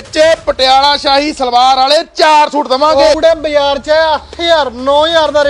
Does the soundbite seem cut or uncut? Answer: cut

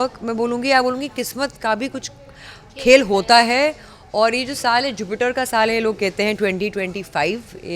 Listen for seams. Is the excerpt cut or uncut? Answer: uncut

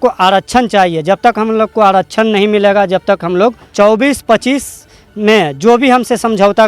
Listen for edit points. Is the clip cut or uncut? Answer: cut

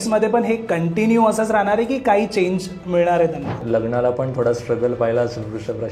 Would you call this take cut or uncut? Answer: cut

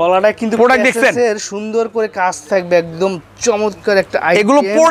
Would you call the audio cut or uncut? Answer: uncut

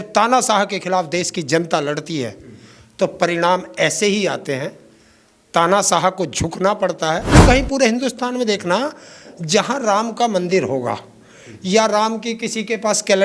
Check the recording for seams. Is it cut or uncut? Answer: cut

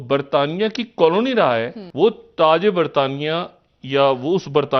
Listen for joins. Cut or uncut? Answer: cut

